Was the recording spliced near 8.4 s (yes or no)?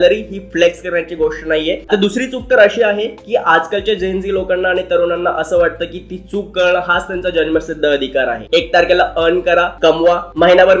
yes